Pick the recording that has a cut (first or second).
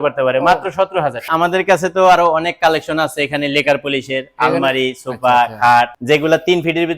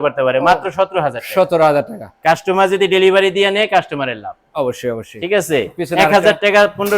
first